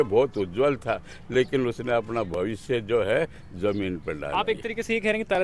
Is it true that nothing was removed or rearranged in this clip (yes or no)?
yes